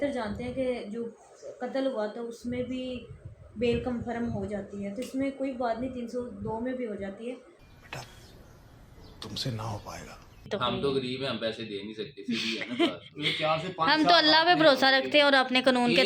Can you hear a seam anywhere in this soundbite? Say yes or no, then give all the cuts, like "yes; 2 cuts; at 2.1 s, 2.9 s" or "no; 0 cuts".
yes; 1 cut; at 10.5 s